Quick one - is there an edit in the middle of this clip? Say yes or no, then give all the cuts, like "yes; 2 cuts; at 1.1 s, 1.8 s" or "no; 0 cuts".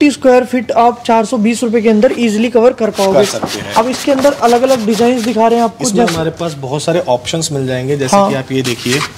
no; 0 cuts